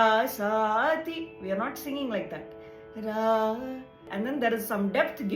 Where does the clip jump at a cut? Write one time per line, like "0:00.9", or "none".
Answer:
0:04.0